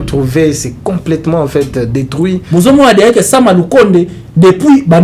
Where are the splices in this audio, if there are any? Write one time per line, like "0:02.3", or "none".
0:02.4